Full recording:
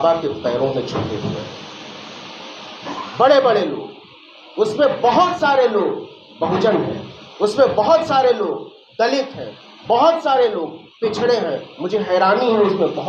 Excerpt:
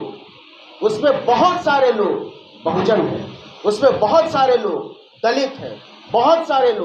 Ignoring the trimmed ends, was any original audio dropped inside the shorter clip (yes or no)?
no